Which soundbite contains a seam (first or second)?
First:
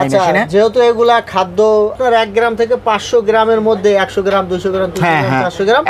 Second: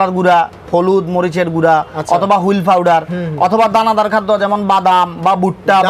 first